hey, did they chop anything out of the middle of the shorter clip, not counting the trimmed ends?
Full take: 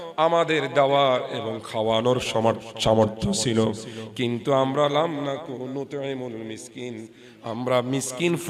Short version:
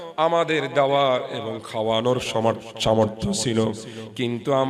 no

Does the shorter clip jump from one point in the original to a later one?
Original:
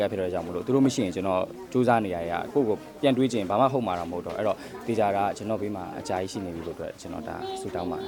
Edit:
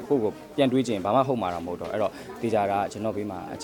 no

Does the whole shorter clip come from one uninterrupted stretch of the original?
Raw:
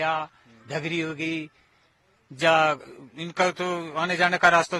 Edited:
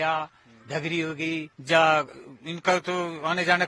no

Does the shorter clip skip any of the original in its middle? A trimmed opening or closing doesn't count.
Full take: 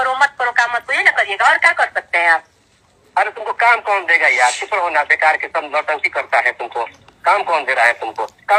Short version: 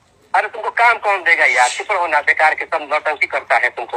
no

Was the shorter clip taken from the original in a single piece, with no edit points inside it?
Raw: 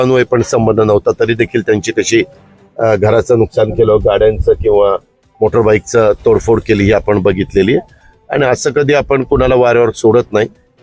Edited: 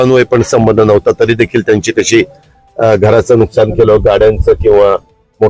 yes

